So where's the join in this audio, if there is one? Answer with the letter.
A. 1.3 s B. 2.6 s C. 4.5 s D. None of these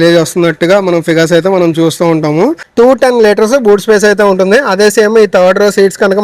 B